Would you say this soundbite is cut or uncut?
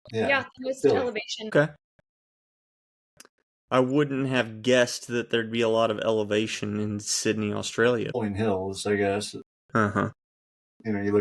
cut